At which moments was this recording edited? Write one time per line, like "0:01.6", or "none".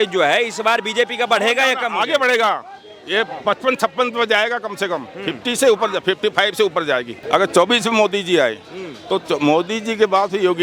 0:07.2